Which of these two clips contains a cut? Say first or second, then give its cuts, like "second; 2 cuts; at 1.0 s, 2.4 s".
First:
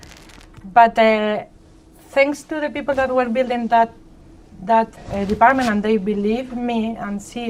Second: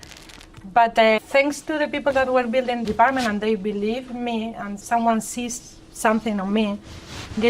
second; 3 cuts; at 1.2 s, 2.8 s, 4.8 s